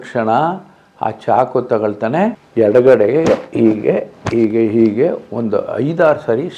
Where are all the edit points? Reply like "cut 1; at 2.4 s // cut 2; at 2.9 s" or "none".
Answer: cut 1; at 2.4 s